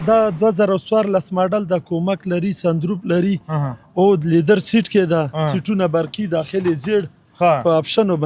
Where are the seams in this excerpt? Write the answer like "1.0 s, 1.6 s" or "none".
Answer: none